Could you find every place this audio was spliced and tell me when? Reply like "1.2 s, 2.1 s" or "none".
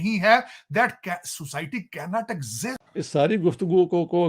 2.8 s